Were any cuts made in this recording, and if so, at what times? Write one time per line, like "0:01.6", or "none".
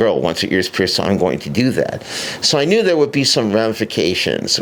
none